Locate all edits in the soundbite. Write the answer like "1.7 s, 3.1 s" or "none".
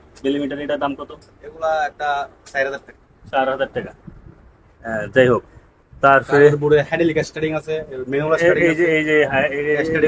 none